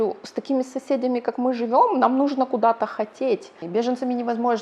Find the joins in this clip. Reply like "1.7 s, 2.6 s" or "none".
3.6 s